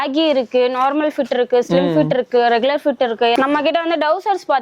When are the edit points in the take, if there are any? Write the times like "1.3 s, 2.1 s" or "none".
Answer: 3.4 s